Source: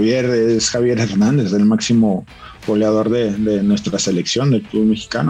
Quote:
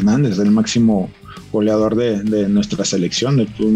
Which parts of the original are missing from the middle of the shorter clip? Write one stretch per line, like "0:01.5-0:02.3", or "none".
none